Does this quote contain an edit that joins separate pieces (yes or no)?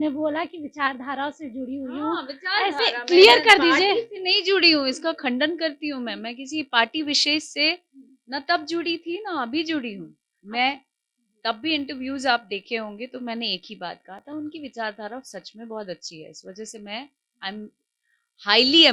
no